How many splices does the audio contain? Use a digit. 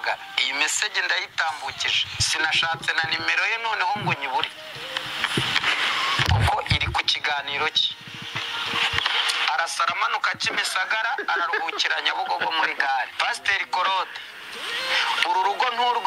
0